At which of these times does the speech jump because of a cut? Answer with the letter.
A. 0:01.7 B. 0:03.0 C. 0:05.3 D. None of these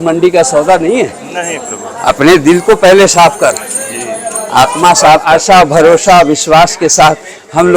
C